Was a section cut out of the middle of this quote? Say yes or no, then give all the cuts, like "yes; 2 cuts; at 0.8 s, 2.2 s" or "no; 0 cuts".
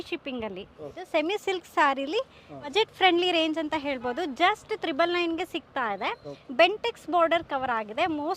yes; 3 cuts; at 1.0 s, 2.7 s, 6.4 s